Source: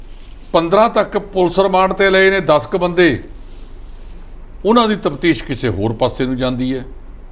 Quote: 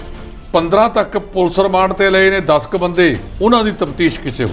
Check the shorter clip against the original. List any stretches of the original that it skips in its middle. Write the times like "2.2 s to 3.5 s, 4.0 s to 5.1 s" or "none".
3.3 s to 4.5 s